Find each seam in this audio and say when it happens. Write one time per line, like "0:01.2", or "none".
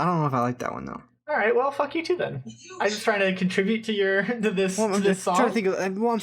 none